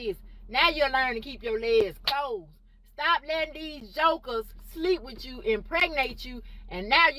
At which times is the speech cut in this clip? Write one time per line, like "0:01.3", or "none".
none